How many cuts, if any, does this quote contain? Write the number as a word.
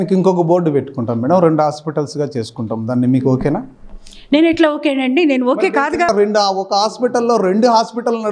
one